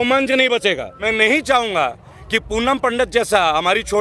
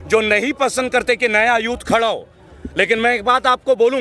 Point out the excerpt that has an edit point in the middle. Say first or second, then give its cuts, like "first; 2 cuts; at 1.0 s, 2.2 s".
first; 1 cut; at 0.9 s